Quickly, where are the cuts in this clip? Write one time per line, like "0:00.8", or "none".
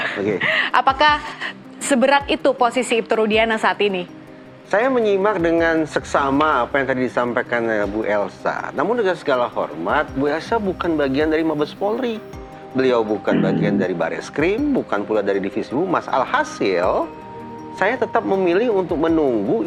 none